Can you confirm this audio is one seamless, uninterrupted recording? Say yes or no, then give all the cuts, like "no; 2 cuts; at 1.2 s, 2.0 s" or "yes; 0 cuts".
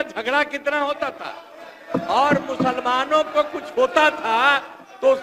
yes; 0 cuts